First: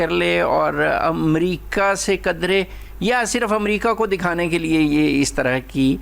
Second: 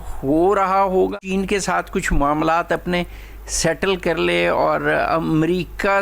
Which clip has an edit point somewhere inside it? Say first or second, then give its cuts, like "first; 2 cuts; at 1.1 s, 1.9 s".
second; 1 cut; at 1.1 s